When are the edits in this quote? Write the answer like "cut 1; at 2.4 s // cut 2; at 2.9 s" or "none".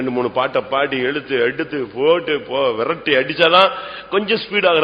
none